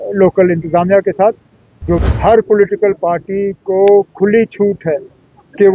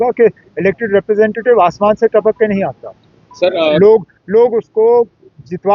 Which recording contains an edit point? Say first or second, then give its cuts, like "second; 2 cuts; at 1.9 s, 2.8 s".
first; 1 cut; at 2.0 s